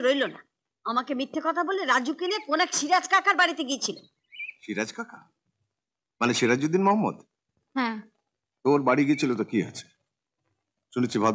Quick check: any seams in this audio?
no; 0 cuts

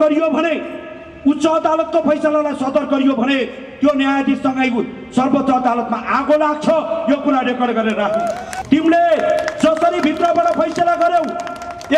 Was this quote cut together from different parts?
yes; 1 cut; at 8.5 s

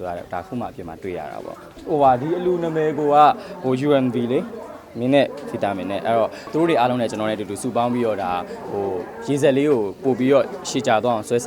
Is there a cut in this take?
yes; 2 cuts; at 1.7 s, 6.4 s

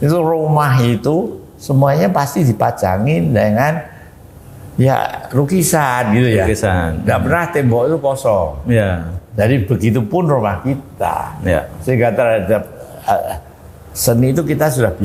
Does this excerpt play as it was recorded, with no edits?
yes; 0 cuts

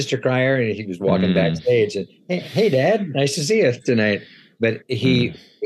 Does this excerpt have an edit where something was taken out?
no; 0 cuts

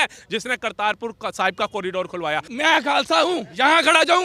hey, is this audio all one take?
no; 1 cut; at 2.5 s

